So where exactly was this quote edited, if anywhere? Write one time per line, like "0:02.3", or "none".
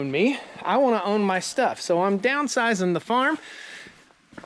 none